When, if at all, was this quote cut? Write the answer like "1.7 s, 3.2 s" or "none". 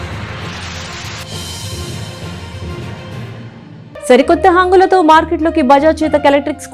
none